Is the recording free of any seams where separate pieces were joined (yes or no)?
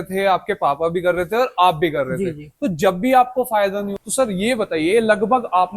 no